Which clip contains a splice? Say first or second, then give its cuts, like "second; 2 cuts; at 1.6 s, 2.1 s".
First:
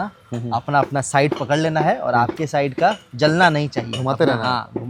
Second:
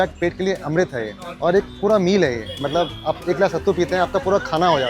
second; 1 cut; at 1.2 s